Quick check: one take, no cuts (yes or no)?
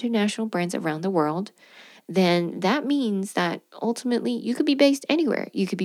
yes